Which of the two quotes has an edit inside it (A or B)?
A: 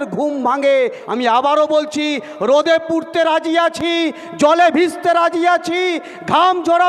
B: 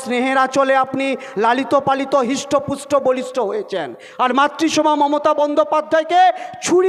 A